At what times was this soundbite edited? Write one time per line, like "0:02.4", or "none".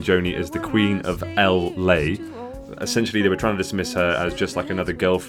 0:02.6